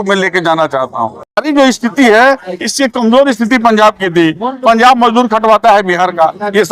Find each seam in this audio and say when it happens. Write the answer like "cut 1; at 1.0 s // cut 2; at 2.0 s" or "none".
cut 1; at 1.4 s